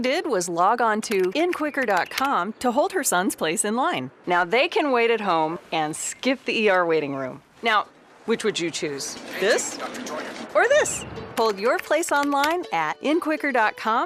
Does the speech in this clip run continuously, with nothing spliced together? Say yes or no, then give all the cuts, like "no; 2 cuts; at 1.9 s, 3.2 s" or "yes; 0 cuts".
yes; 0 cuts